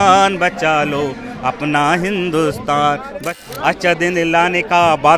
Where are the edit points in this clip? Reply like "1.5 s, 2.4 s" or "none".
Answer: 3.1 s